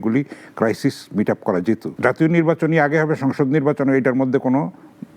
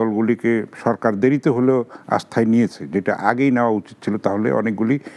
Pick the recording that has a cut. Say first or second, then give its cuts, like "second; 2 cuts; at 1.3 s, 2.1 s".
first; 1 cut; at 1.9 s